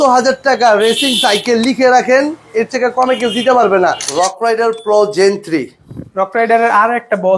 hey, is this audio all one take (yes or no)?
no